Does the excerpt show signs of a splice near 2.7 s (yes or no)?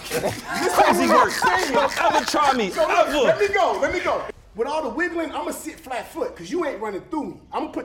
no